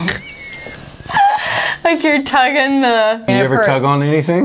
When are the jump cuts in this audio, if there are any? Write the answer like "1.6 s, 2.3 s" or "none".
3.3 s